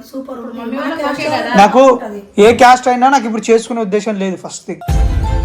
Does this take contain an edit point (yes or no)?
no